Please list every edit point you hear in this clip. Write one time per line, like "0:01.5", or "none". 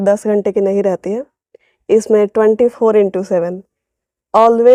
none